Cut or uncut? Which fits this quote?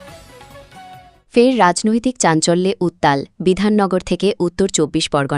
cut